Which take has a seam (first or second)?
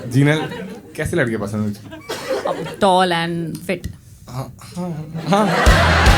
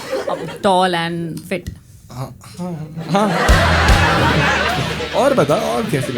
second